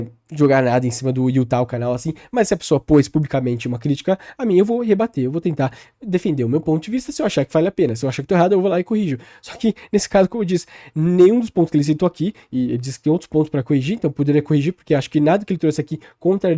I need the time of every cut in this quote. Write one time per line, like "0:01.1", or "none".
none